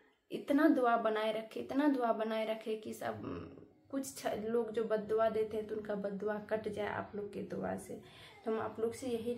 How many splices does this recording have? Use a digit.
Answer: 0